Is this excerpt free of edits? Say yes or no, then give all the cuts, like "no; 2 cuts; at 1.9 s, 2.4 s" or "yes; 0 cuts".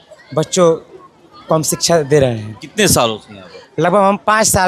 yes; 0 cuts